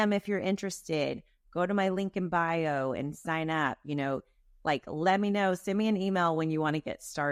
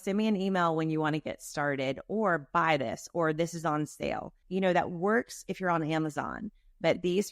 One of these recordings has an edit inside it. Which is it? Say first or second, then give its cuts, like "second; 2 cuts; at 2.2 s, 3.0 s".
second; 1 cut; at 4.4 s